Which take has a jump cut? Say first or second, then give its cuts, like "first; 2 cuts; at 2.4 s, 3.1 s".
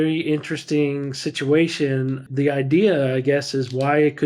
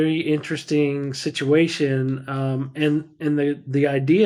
first; 1 cut; at 2.3 s